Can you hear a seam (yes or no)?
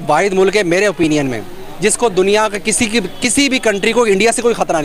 no